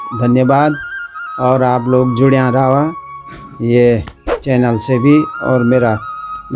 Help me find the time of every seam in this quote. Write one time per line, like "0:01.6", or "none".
none